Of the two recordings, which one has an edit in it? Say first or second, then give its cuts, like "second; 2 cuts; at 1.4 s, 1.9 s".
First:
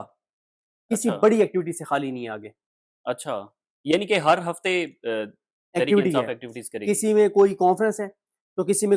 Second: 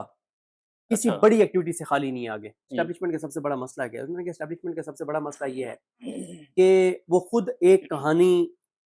second; 1 cut; at 2.7 s